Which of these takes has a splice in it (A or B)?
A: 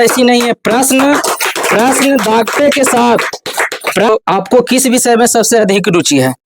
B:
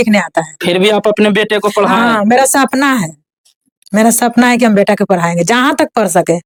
A